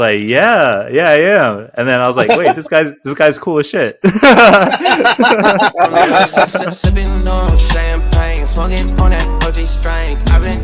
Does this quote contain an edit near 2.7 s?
no; 1 cut; at 6.8 s

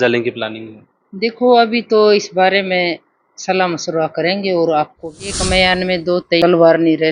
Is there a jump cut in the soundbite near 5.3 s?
yes; 2 cuts; at 5.3 s, 6.4 s

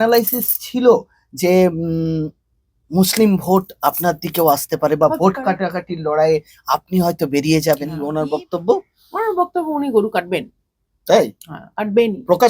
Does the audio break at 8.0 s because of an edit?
yes; 1 cut; at 8.0 s

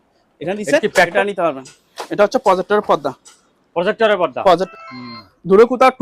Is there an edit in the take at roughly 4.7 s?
yes; 2 cuts; at 1.1 s, 4.7 s

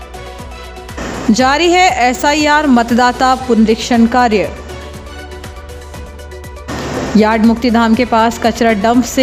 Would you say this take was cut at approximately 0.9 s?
yes; 1 cut; at 0.9 s

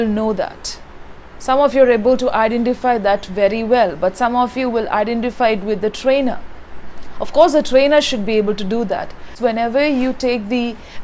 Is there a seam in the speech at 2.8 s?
no; 0 cuts

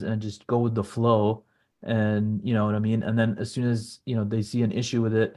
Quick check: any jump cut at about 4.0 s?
no; 0 cuts

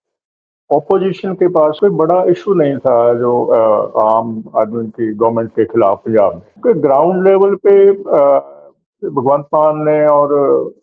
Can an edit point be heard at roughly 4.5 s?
no; 2 cuts; at 1.8 s, 6.5 s

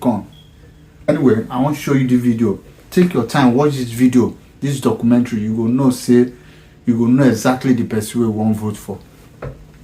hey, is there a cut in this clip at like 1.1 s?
yes; 1 cut; at 1.1 s

